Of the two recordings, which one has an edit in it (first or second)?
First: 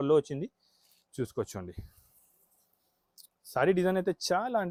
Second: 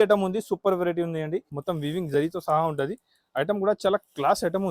second